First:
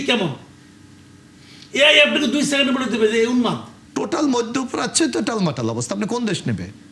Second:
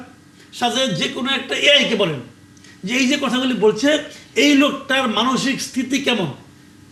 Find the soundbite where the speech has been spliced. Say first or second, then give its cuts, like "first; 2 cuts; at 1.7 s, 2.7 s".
first; 1 cut; at 3.8 s